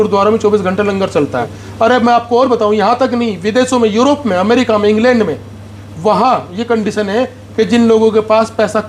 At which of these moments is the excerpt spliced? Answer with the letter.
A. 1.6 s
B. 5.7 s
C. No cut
A